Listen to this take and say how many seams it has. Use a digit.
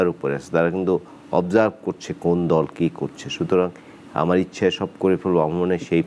0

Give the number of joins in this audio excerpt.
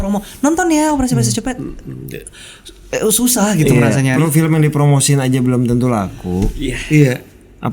1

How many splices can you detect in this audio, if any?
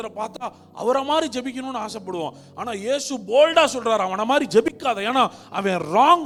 0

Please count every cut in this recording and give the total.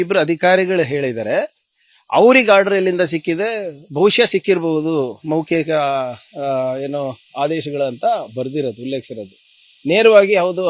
1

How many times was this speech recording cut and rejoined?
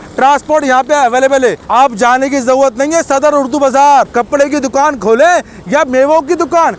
2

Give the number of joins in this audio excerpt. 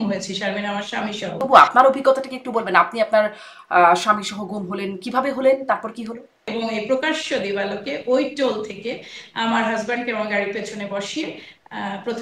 2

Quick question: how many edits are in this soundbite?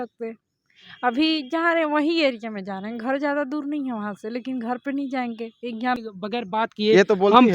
1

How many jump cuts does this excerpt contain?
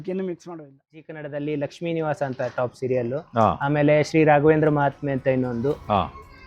1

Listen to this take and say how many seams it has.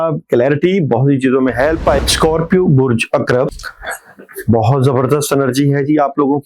2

